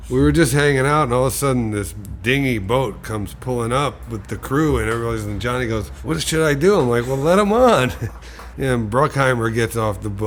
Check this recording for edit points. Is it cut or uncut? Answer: uncut